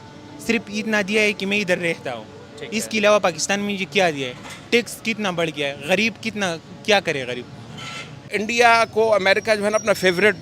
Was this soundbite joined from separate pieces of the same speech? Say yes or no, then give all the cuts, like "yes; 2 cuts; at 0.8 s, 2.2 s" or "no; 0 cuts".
yes; 1 cut; at 8.3 s